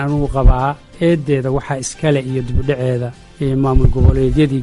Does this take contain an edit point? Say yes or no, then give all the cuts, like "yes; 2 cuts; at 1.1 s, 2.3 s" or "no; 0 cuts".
yes; 2 cuts; at 0.9 s, 3.2 s